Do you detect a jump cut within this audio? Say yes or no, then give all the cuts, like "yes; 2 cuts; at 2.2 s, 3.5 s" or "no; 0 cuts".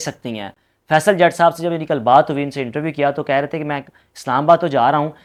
no; 0 cuts